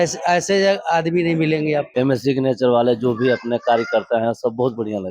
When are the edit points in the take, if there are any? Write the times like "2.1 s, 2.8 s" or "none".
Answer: 1.9 s